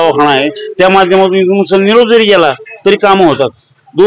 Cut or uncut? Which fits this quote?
uncut